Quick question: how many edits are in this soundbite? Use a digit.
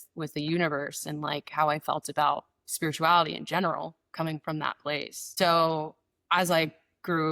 1